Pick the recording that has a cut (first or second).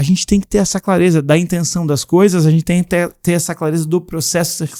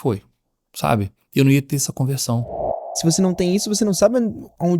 second